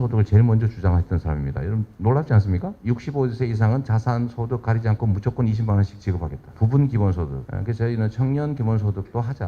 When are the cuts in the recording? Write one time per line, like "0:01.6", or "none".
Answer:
0:02.7
0:06.4
0:07.4